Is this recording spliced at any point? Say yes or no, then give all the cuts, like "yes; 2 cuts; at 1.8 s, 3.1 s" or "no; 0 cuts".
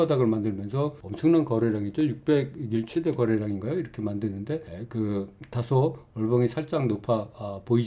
no; 0 cuts